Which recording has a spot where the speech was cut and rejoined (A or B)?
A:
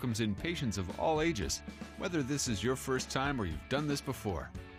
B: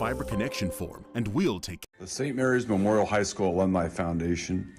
B